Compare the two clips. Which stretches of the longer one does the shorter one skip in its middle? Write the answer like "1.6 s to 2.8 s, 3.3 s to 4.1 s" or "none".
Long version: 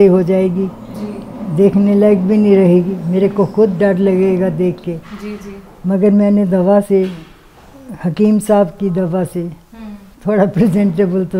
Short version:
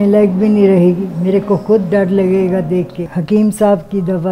4.9 s to 7.9 s